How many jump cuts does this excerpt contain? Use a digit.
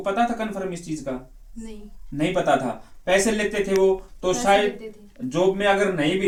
0